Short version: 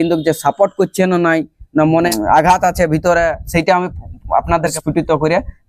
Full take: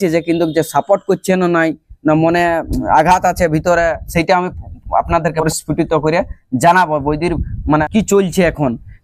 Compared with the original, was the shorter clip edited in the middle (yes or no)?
yes